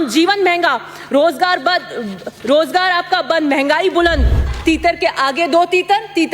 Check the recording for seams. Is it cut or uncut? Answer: cut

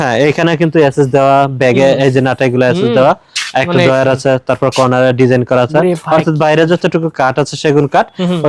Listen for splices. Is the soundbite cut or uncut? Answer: uncut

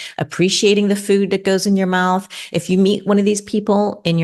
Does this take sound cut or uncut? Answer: uncut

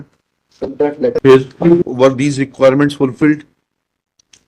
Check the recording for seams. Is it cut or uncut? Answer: cut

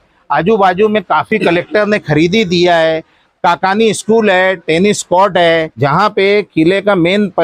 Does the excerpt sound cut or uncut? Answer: cut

